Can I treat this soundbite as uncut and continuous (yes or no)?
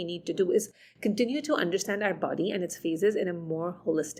yes